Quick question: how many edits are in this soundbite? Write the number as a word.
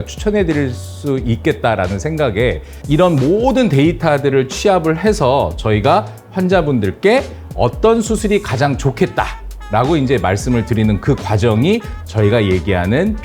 one